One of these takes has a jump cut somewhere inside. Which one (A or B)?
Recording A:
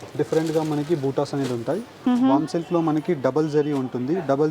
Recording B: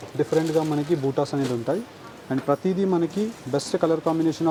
A